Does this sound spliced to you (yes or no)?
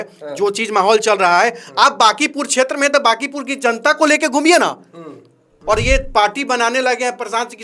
yes